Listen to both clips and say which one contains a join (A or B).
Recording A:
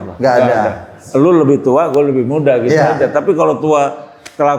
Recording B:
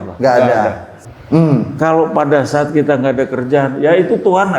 B